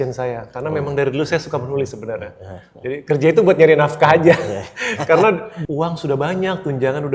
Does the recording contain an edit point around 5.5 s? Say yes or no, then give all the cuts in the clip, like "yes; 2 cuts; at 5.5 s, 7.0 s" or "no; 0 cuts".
yes; 1 cut; at 5.5 s